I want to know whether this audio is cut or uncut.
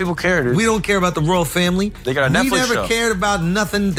uncut